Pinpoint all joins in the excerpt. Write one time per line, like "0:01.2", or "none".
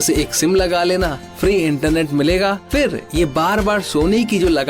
0:01.2
0:02.6